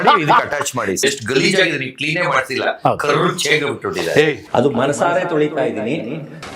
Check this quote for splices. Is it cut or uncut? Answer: cut